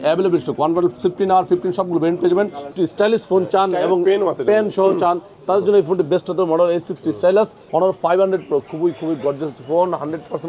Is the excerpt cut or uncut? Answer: cut